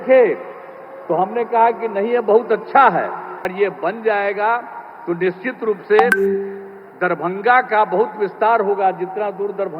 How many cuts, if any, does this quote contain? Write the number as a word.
one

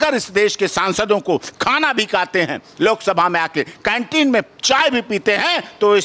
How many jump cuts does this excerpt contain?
zero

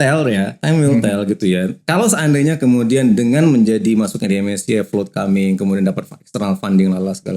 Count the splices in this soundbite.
zero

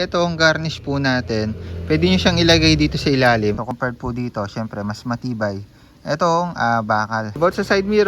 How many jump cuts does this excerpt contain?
two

